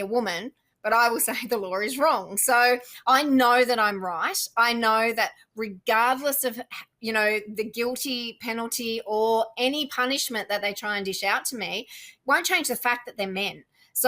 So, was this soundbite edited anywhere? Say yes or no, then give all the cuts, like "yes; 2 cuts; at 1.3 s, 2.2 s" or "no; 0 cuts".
yes; 1 cut; at 2.9 s